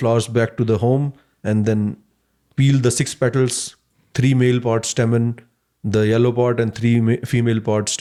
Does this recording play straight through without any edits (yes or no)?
yes